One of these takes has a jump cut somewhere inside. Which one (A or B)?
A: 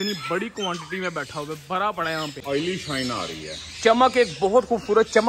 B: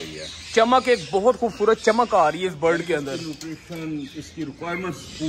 A